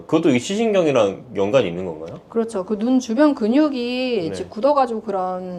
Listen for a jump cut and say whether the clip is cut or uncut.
uncut